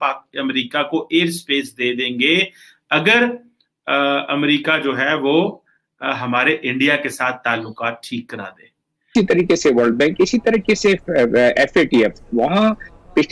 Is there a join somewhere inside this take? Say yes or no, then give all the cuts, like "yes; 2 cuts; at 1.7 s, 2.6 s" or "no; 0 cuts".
yes; 1 cut; at 9.1 s